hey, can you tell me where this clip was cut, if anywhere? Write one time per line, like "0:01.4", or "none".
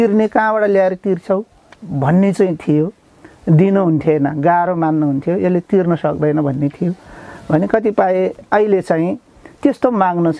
0:01.7